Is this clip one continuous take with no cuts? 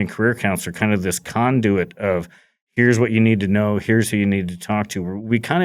yes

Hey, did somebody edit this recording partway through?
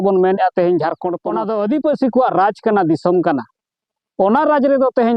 yes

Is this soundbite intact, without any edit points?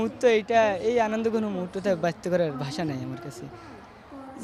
yes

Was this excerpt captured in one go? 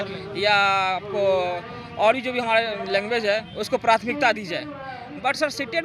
yes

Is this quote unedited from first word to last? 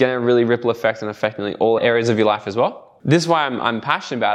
no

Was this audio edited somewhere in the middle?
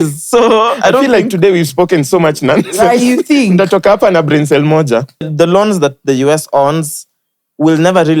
yes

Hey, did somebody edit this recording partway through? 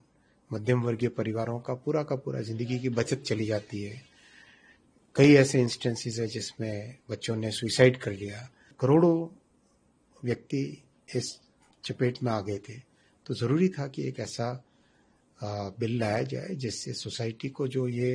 yes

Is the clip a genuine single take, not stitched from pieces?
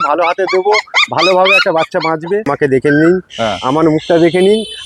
no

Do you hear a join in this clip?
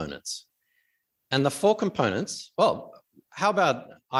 no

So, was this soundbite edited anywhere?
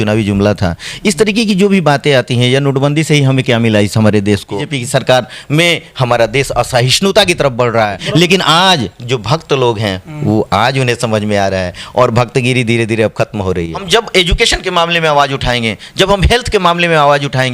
yes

